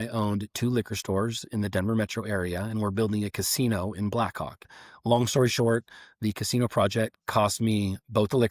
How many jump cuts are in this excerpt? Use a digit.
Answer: 1